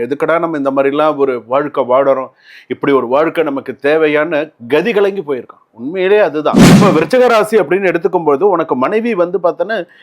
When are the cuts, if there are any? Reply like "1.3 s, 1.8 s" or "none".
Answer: 6.7 s

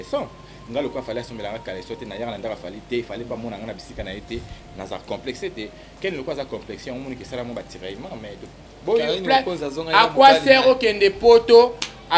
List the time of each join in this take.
8.5 s

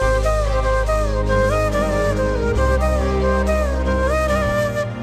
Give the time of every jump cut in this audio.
none

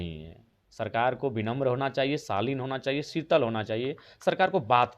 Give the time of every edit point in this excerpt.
none

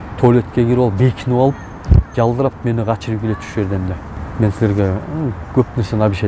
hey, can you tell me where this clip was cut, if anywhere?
none

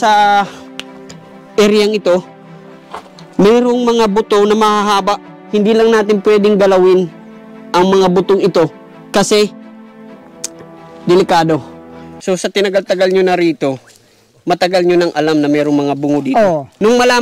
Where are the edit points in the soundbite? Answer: 12.0 s

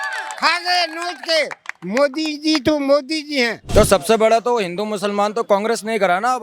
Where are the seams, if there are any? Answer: 3.6 s

